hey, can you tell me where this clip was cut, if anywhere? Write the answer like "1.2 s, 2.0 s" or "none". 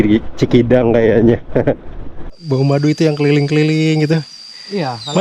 2.4 s